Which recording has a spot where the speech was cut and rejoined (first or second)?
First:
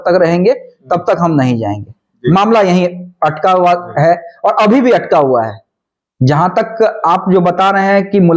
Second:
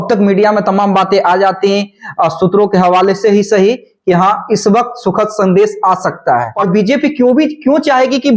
second